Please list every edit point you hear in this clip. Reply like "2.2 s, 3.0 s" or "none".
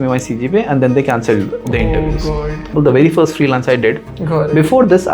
2.7 s, 4.1 s